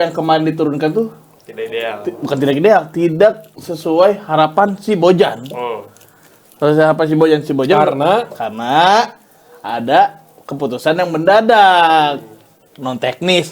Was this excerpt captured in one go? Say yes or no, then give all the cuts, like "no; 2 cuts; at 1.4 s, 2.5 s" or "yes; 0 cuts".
yes; 0 cuts